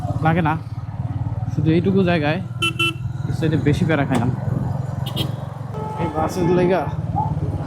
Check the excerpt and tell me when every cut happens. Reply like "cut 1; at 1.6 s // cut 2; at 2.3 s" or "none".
cut 1; at 5.7 s